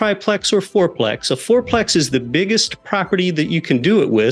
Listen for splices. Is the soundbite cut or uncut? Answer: uncut